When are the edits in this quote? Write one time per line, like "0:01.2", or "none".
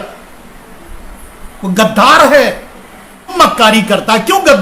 0:03.3